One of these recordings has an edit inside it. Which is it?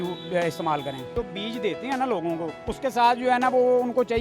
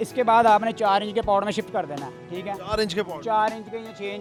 first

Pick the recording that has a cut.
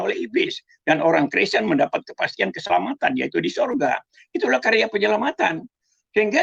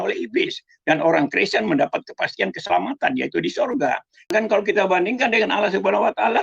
second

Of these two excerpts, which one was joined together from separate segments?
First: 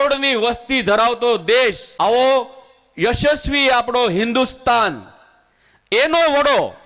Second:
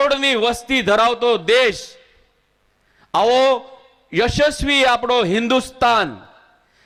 first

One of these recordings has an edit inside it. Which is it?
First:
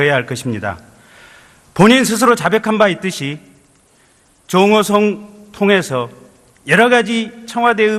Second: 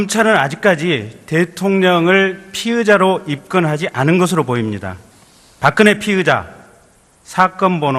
second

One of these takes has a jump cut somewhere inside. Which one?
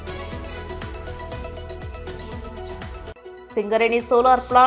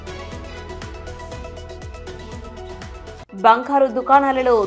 second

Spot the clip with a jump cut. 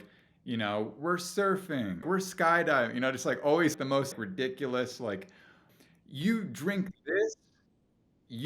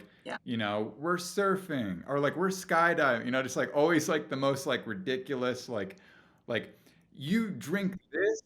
first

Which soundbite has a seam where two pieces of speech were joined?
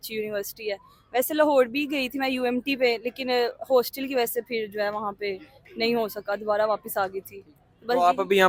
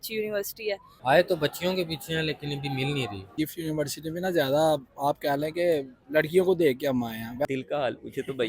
second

